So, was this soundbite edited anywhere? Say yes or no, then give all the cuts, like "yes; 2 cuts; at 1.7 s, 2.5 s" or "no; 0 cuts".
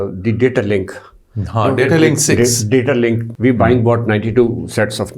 yes; 1 cut; at 3.3 s